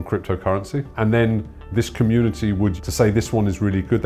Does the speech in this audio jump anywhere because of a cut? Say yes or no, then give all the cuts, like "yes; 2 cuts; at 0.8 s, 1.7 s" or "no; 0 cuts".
yes; 2 cuts; at 0.9 s, 2.8 s